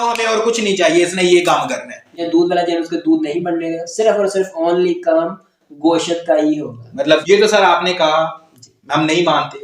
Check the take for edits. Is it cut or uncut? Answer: cut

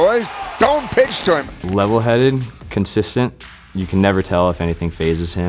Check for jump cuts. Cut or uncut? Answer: cut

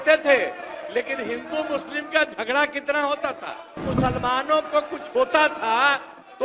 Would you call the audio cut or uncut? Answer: cut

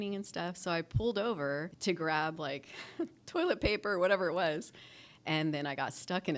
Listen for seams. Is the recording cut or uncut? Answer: cut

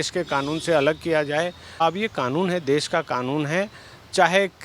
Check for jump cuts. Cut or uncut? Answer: cut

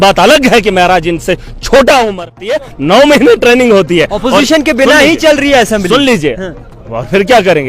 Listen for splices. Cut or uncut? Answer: cut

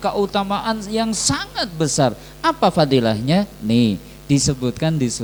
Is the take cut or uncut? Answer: uncut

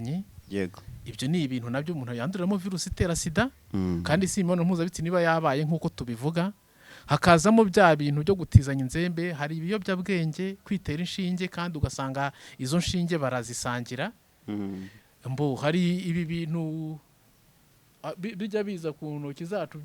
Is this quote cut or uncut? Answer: uncut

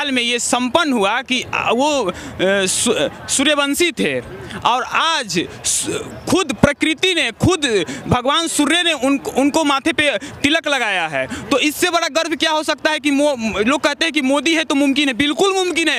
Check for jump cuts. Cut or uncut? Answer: uncut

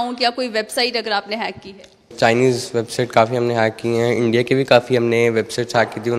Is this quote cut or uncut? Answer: cut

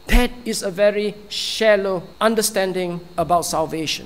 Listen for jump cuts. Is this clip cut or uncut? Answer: cut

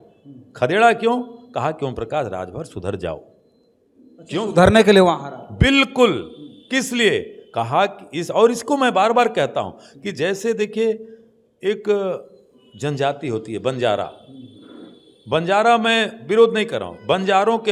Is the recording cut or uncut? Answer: uncut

